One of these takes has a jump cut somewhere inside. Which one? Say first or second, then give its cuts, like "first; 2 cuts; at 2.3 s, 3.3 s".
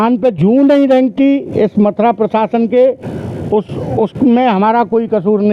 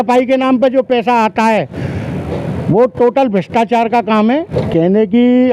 second; 1 cut; at 4.6 s